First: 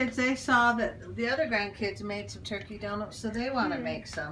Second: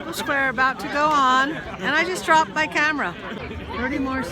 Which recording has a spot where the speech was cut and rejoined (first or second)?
second